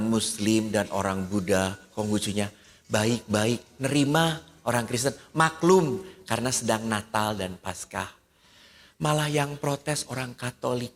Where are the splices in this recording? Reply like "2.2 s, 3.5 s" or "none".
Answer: none